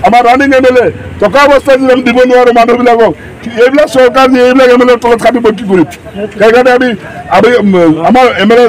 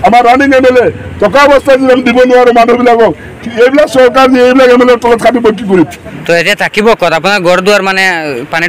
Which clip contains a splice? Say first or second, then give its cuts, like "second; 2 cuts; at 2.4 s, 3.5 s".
second; 1 cut; at 6.1 s